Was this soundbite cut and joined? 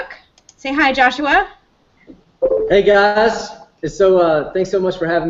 no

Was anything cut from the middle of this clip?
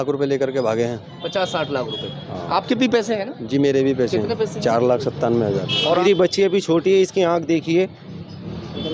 yes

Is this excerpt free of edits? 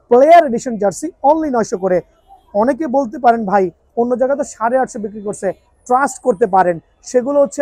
yes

